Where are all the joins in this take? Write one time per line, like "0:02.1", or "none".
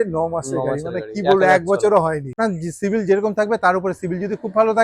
0:02.4